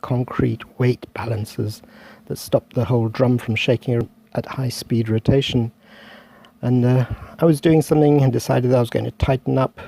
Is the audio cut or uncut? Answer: uncut